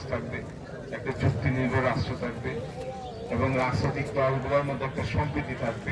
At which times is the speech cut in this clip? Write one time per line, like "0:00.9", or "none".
none